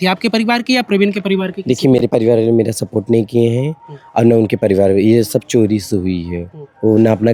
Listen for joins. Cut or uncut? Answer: uncut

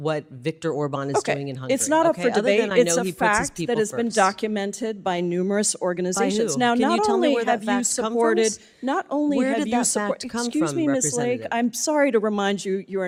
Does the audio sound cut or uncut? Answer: uncut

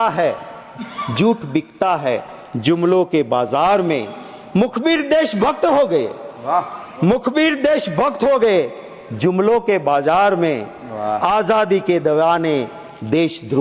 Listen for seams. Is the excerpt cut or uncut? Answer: uncut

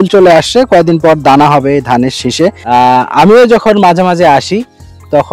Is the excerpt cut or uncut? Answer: cut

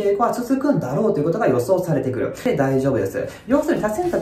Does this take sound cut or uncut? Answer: cut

